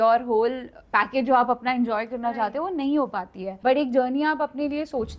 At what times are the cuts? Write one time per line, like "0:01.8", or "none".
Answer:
0:03.4

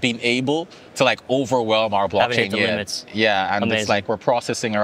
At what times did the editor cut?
none

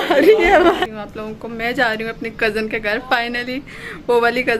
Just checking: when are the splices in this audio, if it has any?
0:01.0

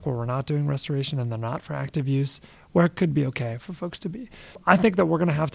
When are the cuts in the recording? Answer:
0:04.6

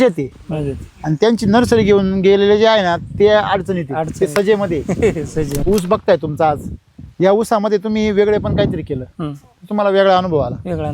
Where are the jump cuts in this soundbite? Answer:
0:05.5

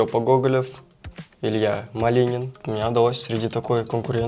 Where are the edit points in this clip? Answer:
0:02.6

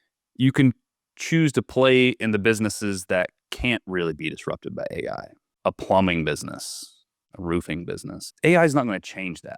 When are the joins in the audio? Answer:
0:05.4
0:08.2

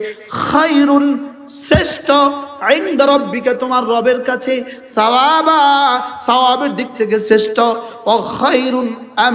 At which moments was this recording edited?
none

